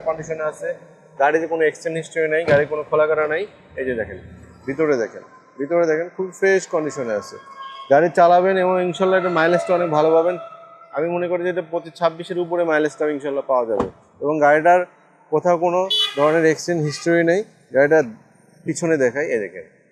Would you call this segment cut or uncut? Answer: uncut